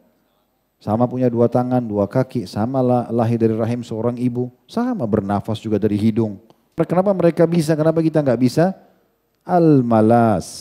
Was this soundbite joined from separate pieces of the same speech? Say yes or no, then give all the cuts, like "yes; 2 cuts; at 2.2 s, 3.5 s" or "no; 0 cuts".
yes; 1 cut; at 6.8 s